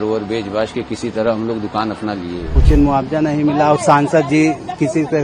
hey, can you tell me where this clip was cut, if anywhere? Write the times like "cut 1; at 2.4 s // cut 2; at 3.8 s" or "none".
cut 1; at 2.6 s

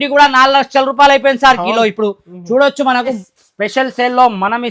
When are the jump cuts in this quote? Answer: cut 1; at 3.2 s

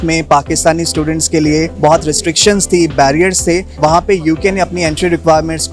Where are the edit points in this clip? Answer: cut 1; at 1.7 s // cut 2; at 3.7 s

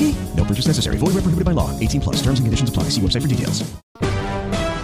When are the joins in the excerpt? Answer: cut 1; at 3.9 s

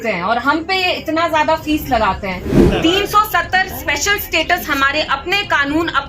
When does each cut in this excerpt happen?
cut 1; at 2.5 s

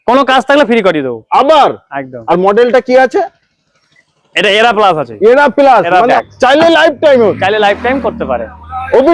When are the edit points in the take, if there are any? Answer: cut 1; at 6.2 s

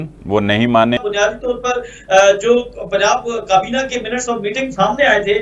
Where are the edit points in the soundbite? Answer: cut 1; at 1.0 s

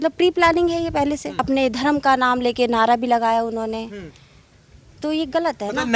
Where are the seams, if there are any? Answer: cut 1; at 1.4 s

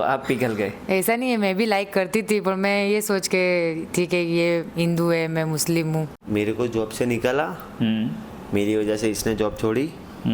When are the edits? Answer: cut 1; at 6.2 s

